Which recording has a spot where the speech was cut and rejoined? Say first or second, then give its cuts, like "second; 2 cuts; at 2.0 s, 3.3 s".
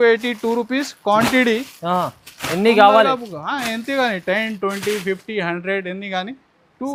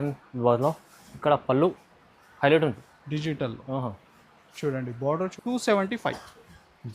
second; 1 cut; at 5.3 s